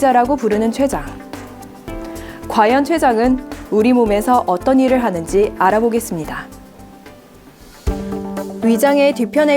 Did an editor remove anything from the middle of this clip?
yes; 1 cut; at 8.1 s

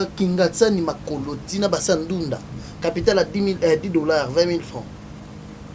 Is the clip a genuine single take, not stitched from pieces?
yes; 0 cuts

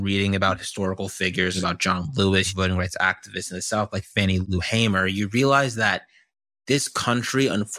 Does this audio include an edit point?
yes; 3 cuts; at 1.6 s, 2.5 s, 4.4 s

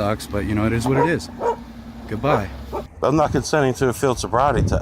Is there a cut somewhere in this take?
yes; 1 cut; at 2.9 s

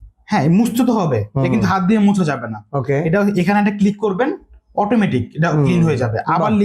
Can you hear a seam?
no; 0 cuts

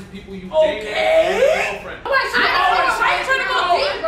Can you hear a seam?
yes; 1 cut; at 2.1 s

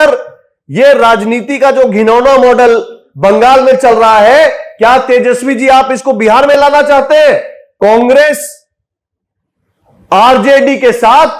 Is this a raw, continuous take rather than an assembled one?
no; 1 cut; at 7.6 s

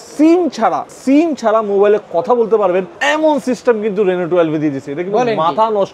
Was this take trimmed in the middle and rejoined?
yes; 2 cuts; at 0.9 s, 2.9 s

